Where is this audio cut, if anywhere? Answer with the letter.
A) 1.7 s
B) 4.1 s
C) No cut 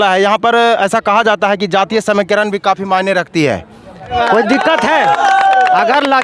B